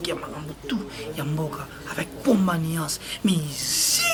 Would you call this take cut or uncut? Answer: uncut